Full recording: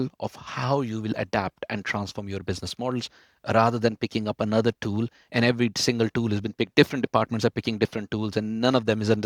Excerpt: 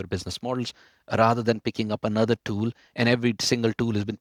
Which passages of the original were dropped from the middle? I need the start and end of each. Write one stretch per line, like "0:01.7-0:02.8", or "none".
none